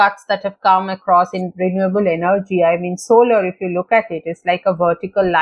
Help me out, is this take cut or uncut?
uncut